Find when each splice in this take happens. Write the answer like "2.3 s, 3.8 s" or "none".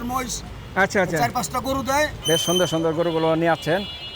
2.2 s